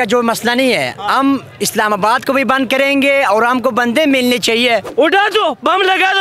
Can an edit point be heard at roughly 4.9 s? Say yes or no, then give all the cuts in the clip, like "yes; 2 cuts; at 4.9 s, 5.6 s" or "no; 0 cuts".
yes; 1 cut; at 4.9 s